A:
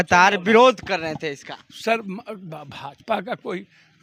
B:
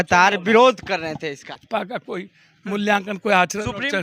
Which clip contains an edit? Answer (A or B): B